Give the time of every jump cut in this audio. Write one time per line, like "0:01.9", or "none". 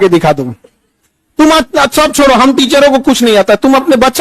none